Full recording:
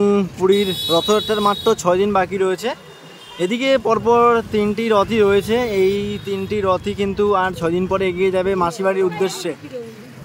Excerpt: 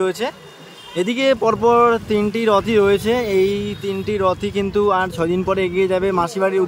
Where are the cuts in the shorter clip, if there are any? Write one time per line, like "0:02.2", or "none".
none